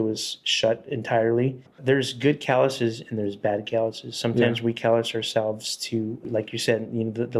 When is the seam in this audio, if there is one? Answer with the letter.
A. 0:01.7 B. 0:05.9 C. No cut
A